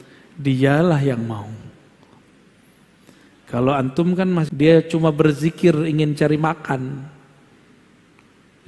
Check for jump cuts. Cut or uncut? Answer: cut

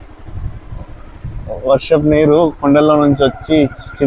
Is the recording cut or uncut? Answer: uncut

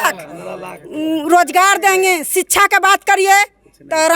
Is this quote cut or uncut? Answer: uncut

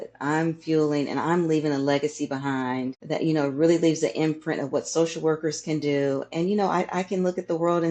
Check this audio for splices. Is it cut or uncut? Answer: cut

